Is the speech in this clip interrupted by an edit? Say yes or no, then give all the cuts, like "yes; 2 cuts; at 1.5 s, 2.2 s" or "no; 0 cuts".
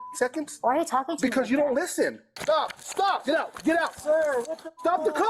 yes; 2 cuts; at 2.3 s, 3.2 s